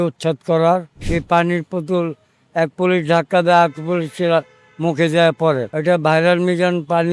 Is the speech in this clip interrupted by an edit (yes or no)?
yes